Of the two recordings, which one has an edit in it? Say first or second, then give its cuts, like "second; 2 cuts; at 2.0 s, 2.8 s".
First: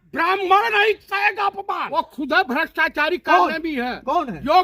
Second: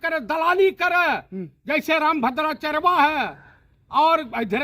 first; 1 cut; at 1.9 s